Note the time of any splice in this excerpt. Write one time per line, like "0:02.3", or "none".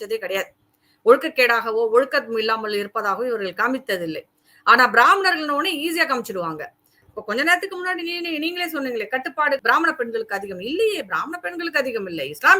0:09.6